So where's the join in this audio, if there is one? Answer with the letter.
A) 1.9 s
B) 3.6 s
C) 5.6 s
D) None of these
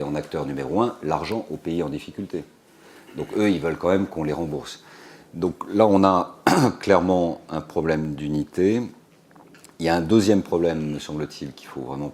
A